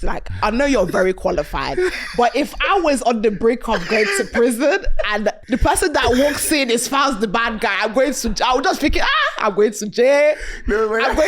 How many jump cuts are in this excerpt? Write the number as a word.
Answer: one